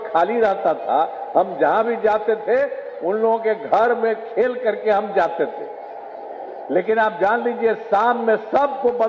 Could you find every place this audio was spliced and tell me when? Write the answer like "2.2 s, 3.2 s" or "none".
none